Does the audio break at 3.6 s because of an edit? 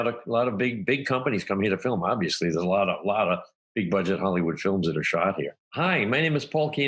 no; 1 cut; at 5.6 s

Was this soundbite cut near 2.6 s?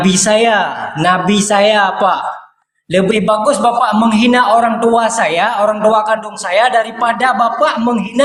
no; 0 cuts

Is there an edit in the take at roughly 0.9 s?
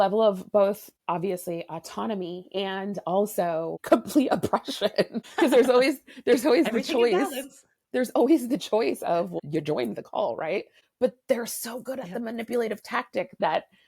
yes; 5 cuts; at 0.9 s, 3.8 s, 5.2 s, 9.3 s, 10.8 s

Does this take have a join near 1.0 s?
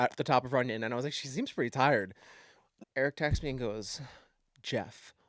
no; 1 cut; at 2.8 s

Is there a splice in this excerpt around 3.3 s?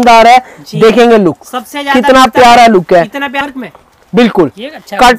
yes; 1 cut; at 3.3 s

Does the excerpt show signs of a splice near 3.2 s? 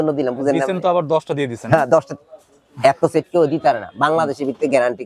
no; 0 cuts

